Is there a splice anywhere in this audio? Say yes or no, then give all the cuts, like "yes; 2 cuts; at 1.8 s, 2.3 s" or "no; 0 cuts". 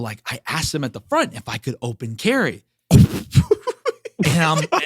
yes; 1 cut; at 2.7 s